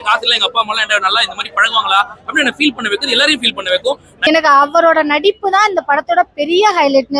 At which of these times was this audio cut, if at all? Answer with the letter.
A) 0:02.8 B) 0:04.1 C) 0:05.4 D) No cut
B